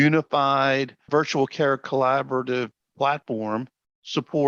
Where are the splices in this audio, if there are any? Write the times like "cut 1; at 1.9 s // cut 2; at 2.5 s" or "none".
none